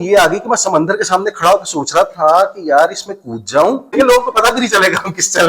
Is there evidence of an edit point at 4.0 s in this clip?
yes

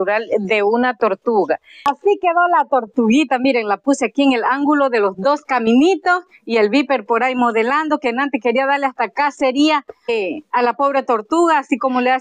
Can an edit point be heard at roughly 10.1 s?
yes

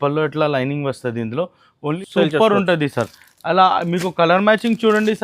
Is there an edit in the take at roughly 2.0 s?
yes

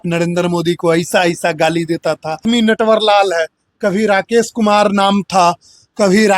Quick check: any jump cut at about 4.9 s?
no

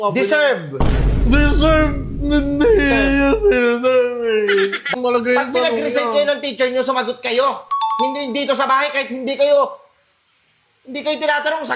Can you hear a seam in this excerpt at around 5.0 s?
yes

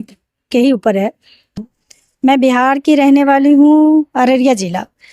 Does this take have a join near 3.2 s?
no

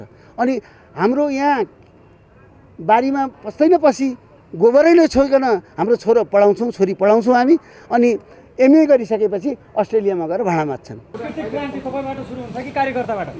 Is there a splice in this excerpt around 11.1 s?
yes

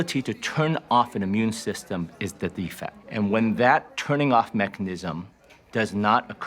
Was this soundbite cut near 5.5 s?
no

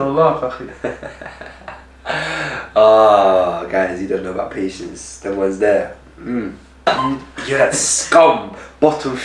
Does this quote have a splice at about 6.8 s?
yes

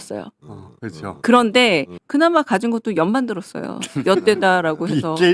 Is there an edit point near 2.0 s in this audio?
yes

